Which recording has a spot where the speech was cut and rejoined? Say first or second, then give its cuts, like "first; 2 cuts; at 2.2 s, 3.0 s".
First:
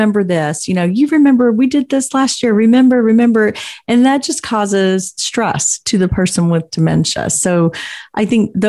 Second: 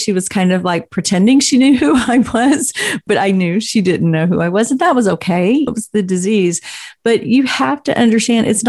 second; 2 cuts; at 3.0 s, 5.7 s